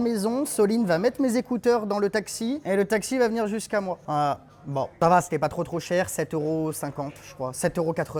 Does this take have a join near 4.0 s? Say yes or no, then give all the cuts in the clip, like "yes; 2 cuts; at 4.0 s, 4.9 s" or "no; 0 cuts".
no; 0 cuts